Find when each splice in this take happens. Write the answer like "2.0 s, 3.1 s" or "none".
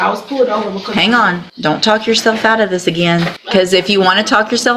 1.5 s, 3.4 s